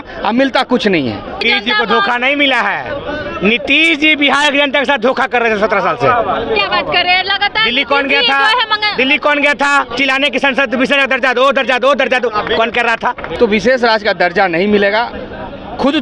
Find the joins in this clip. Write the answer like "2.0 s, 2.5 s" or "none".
1.4 s, 13.3 s